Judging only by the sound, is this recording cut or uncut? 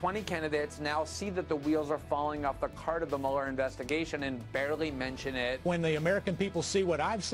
cut